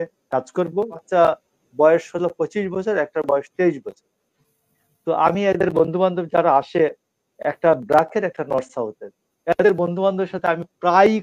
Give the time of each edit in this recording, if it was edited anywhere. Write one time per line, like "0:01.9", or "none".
0:01.0